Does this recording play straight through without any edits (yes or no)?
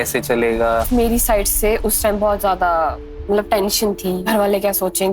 no